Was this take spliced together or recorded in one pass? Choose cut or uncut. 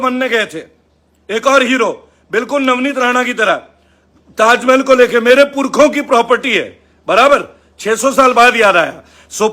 uncut